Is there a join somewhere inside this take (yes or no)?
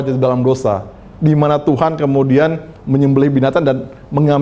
no